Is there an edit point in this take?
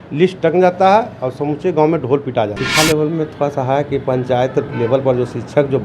yes; 1 cut; at 2.5 s

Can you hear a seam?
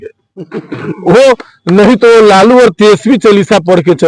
no; 0 cuts

